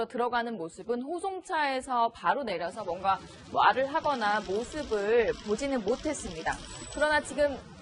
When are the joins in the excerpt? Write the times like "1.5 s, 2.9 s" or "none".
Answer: 4.1 s